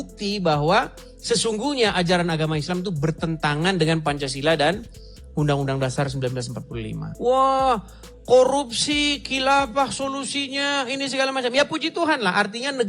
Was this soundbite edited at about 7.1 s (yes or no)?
yes